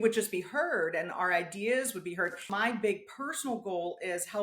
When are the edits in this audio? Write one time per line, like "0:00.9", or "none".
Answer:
0:02.5